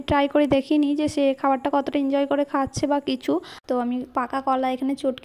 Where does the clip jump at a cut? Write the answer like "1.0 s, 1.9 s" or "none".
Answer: 3.5 s